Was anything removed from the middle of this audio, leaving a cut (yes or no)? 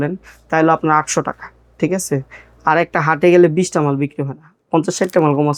no